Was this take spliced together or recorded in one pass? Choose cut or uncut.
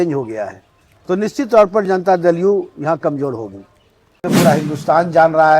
cut